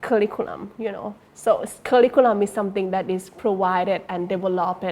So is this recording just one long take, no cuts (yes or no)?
yes